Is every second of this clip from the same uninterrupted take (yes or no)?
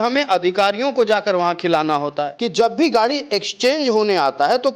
no